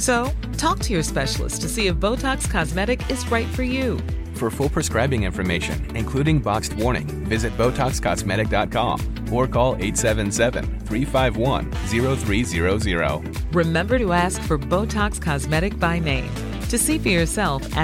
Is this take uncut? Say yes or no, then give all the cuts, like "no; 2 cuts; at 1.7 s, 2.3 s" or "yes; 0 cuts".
yes; 0 cuts